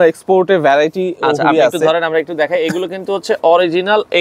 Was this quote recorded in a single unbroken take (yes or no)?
yes